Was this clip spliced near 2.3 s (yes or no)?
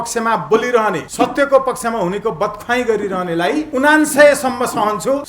no